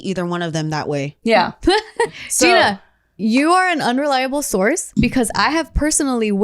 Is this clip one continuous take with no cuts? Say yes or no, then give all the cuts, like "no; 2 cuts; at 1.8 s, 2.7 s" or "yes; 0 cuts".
no; 1 cut; at 2.1 s